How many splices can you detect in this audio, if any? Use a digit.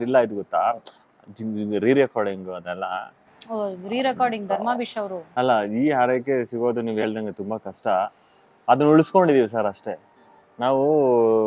1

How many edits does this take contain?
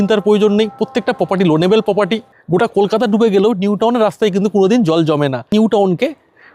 2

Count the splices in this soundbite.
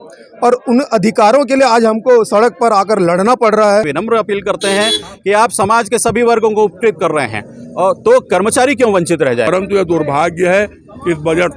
2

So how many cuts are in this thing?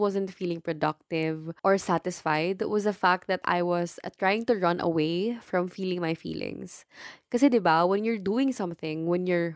1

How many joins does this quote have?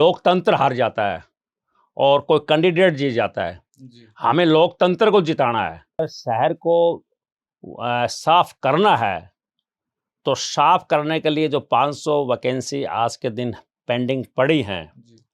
1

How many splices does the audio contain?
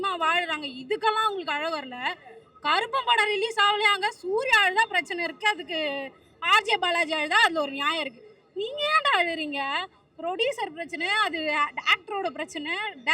0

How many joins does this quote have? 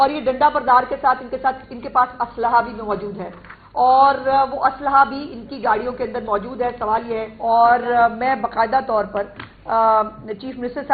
1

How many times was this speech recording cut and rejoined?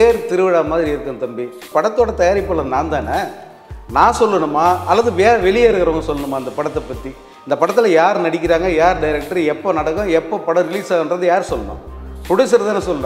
1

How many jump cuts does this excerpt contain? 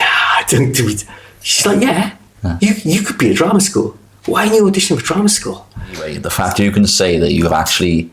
1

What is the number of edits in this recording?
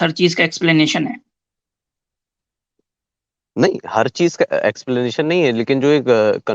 0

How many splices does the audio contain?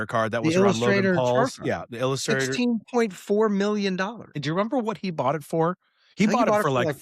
1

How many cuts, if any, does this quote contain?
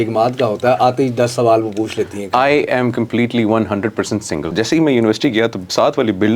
1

